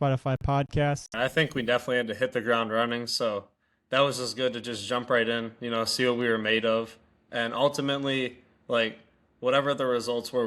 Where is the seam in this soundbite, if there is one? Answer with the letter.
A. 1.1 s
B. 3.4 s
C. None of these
A